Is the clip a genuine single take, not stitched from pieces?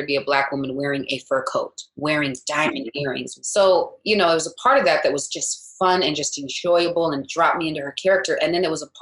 no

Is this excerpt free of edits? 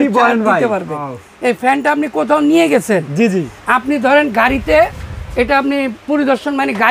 no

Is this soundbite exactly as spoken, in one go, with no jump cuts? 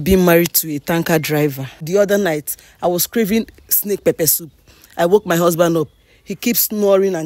no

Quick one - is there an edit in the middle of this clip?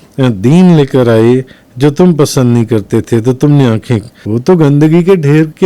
yes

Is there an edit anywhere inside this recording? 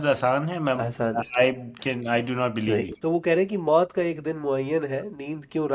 yes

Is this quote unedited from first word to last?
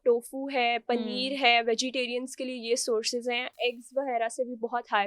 yes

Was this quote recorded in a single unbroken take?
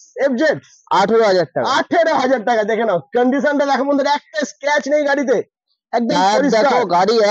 yes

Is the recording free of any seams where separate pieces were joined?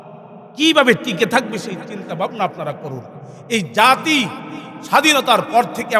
yes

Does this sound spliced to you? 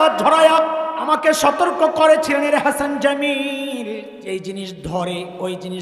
yes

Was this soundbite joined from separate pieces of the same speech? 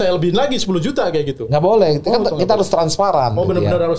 no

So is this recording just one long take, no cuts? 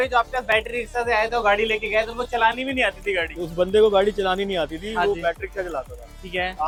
yes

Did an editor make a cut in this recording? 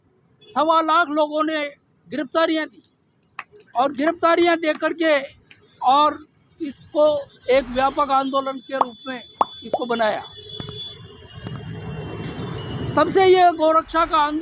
no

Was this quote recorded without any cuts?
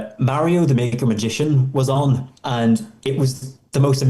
no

